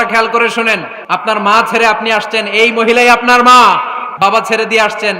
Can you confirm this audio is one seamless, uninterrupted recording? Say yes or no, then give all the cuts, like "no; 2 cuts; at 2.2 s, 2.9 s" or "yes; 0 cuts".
no; 2 cuts; at 0.9 s, 4.0 s